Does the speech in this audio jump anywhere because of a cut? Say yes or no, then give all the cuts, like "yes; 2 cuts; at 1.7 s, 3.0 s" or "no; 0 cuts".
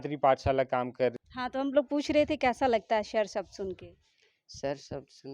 yes; 1 cut; at 1.1 s